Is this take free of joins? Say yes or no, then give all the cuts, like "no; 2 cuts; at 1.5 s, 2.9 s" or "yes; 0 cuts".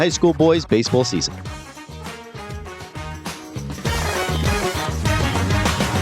no; 1 cut; at 1.3 s